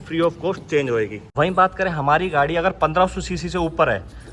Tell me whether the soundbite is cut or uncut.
cut